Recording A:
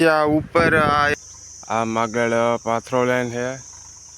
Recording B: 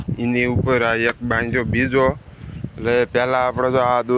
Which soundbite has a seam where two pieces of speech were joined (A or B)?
A